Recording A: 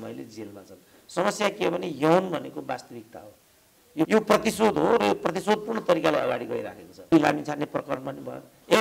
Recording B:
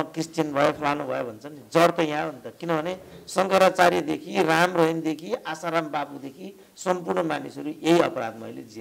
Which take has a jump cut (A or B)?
A